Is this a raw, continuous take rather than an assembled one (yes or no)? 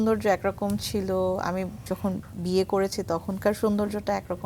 yes